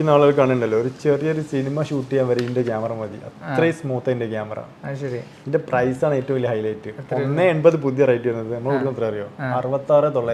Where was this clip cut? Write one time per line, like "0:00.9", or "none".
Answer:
none